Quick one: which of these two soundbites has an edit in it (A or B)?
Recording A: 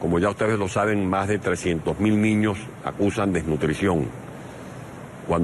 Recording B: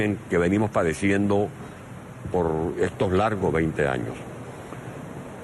B